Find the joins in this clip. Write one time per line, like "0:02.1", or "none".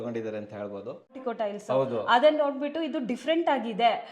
0:01.2